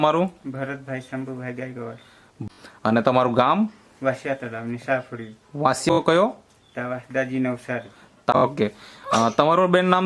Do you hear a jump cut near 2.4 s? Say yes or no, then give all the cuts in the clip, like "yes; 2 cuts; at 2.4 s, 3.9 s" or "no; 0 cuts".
yes; 3 cuts; at 2.4 s, 5.9 s, 8.3 s